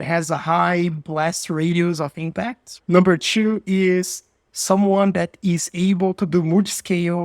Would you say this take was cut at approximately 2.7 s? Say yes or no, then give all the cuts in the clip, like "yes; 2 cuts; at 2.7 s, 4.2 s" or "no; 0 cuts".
yes; 1 cut; at 2.7 s